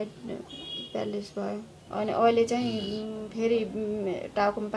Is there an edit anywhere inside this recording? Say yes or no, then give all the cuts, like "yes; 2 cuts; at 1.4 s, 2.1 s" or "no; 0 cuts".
yes; 1 cut; at 1.8 s